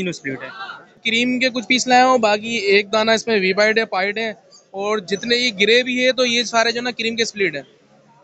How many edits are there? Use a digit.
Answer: 1